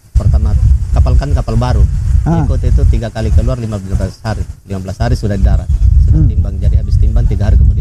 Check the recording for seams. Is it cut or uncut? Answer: uncut